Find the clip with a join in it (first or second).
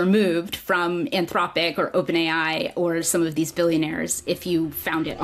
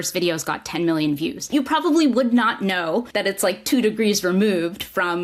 second